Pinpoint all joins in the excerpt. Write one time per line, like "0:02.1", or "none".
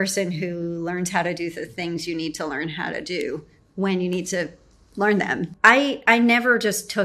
0:05.5